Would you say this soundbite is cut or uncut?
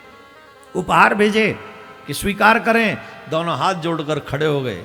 uncut